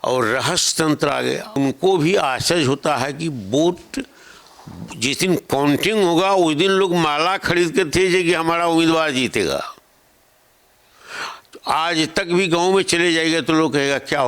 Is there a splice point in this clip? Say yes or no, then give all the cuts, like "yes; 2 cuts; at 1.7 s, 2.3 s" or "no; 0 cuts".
yes; 1 cut; at 1.6 s